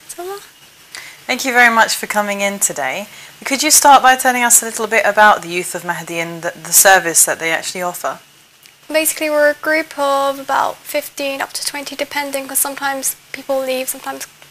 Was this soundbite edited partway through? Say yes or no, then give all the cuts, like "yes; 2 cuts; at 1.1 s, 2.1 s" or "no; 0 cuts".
yes; 1 cut; at 3.0 s